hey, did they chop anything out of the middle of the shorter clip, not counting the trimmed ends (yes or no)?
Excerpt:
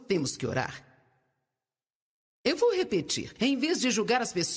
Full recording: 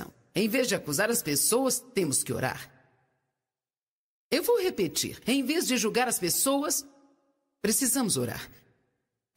no